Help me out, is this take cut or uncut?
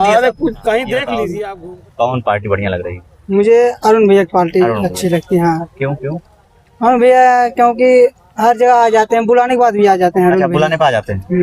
cut